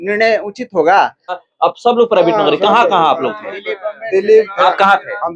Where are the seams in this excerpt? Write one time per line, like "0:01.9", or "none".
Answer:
0:01.4